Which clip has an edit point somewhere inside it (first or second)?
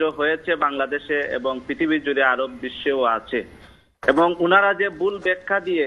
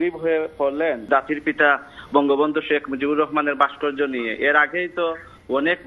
second